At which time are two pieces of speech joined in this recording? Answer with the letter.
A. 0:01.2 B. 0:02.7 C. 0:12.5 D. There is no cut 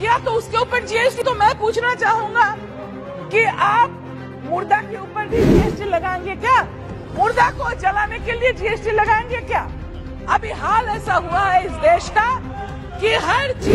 A